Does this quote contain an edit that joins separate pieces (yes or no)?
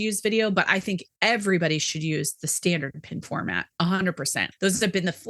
yes